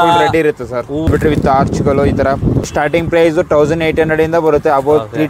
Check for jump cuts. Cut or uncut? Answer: cut